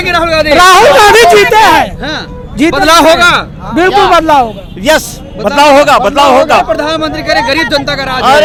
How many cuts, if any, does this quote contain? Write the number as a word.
zero